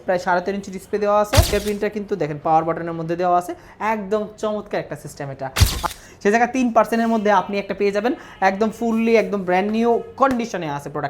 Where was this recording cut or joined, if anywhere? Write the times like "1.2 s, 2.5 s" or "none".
1.5 s, 5.8 s

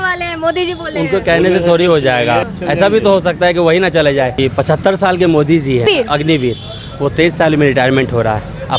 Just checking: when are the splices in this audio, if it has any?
2.5 s, 4.4 s, 5.9 s

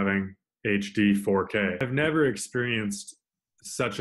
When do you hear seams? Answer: 1.8 s

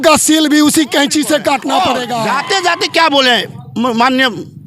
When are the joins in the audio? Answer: 2.1 s

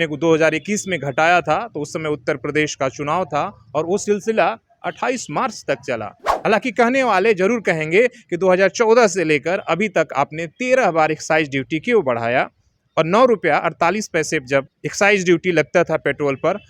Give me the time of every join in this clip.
6.2 s, 14.8 s

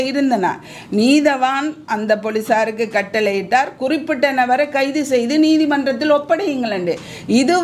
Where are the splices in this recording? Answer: none

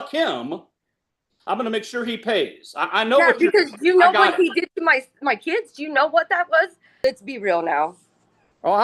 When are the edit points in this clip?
6.9 s

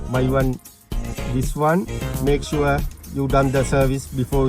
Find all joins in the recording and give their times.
2.0 s

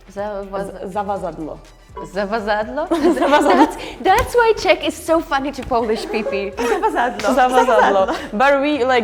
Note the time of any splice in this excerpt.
none

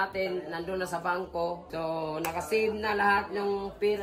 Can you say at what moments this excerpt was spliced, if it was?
1.6 s

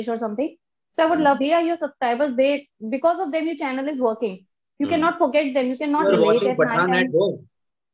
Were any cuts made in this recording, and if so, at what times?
1.4 s, 6.0 s

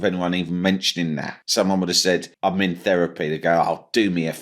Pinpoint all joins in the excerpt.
1.3 s, 2.3 s

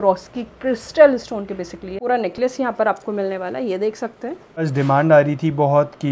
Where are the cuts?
2.0 s, 4.7 s

